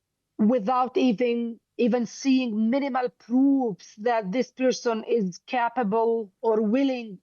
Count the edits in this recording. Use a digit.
0